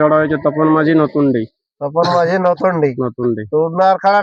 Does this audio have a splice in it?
no; 0 cuts

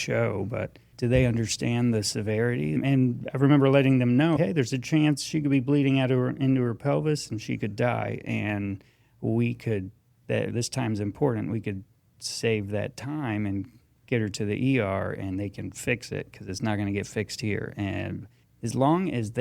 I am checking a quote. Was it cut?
yes; 3 cuts; at 0.9 s, 2.8 s, 4.4 s

